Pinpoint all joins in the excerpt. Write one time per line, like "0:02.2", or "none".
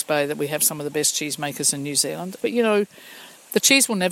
0:02.4